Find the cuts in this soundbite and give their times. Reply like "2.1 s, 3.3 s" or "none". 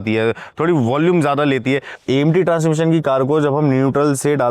1.9 s